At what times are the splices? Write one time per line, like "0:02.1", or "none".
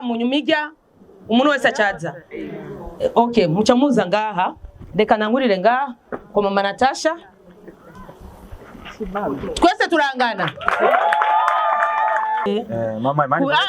0:12.5